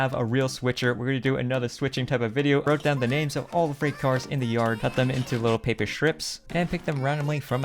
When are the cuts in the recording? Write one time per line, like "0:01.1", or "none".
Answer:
0:02.7
0:06.4